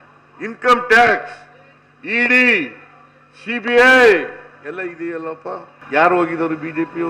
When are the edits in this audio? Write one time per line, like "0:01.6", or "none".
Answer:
0:05.7